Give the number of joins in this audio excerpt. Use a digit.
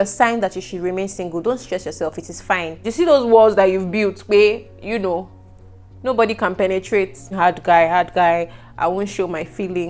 2